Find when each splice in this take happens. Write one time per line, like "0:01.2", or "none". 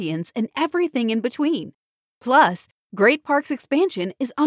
none